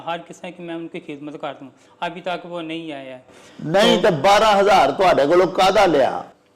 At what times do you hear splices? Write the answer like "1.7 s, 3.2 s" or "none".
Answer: none